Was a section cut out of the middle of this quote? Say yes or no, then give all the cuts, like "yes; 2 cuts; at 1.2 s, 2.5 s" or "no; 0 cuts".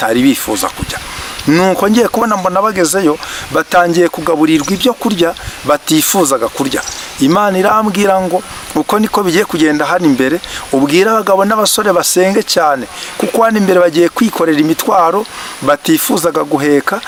no; 0 cuts